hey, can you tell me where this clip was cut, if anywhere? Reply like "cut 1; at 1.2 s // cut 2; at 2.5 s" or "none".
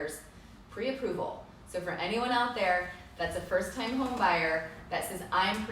none